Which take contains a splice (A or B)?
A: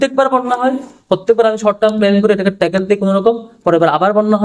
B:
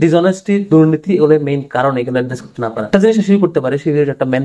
B